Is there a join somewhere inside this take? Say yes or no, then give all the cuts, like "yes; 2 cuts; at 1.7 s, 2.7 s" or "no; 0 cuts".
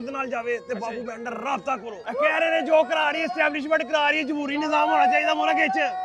yes; 1 cut; at 2.1 s